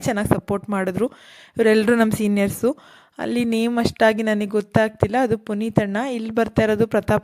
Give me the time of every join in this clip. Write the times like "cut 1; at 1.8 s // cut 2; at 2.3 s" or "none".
none

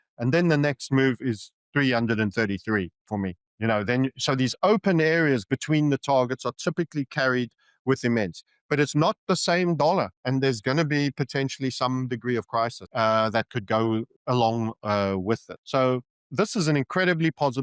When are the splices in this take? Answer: cut 1; at 3.4 s // cut 2; at 12.8 s // cut 3; at 14.1 s // cut 4; at 15.5 s // cut 5; at 16.2 s

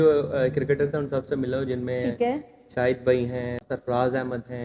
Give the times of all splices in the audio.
cut 1; at 3.6 s

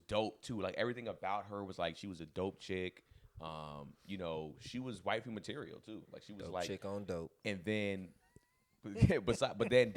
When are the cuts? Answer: none

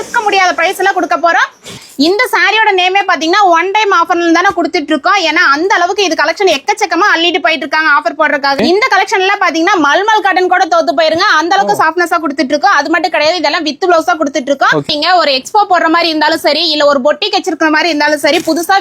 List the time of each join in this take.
cut 1; at 1.8 s // cut 2; at 8.6 s // cut 3; at 14.9 s

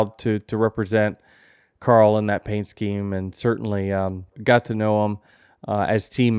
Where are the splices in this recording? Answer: cut 1; at 4.3 s

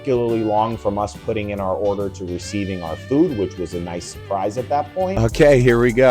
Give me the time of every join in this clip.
cut 1; at 5.1 s

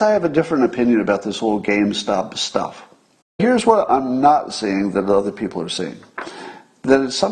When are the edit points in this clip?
cut 1; at 3.4 s

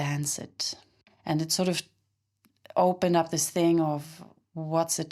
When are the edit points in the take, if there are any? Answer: cut 1; at 1.1 s

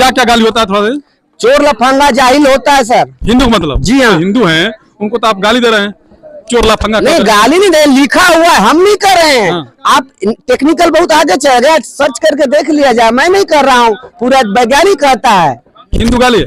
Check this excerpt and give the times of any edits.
none

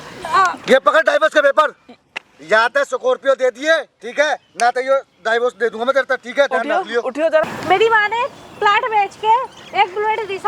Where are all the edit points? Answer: cut 1; at 2.0 s // cut 2; at 4.0 s // cut 3; at 7.5 s

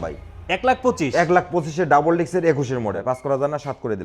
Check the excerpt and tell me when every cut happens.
cut 1; at 3.0 s

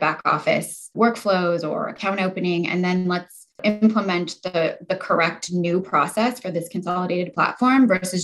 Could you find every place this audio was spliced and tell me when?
cut 1; at 0.9 s // cut 2; at 3.6 s

